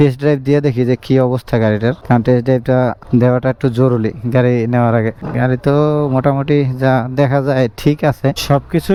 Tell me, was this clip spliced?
no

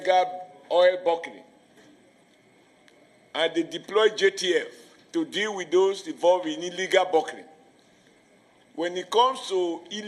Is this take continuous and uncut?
yes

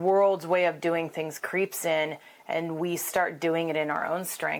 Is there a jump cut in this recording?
no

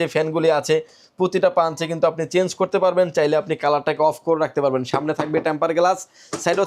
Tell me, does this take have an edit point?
no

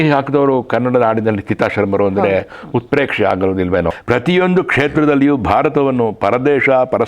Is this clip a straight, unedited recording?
no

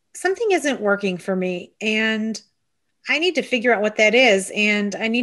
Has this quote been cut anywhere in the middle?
no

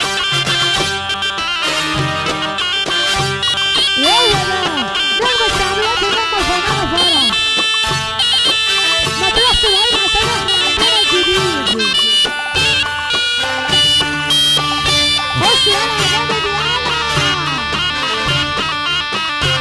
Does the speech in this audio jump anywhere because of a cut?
no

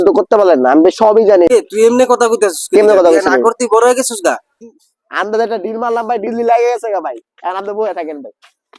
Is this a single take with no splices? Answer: no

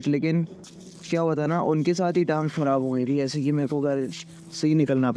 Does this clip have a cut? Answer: no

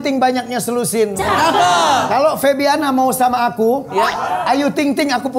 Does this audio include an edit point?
no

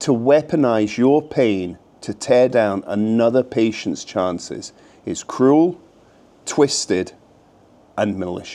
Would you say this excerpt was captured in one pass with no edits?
yes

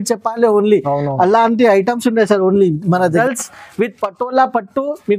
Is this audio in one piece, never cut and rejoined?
no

